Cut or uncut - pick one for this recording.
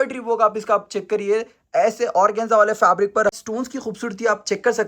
cut